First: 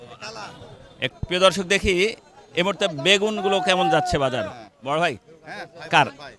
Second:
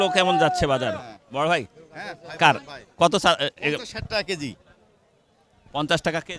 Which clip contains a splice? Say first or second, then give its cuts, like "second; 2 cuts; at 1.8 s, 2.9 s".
first; 1 cut; at 1.1 s